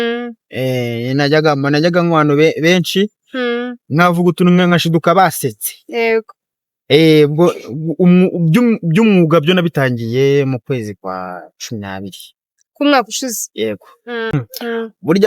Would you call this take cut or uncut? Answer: cut